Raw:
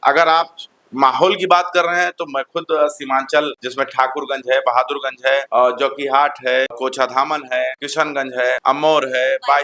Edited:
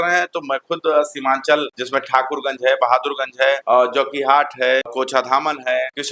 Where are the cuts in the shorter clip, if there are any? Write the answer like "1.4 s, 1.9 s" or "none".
none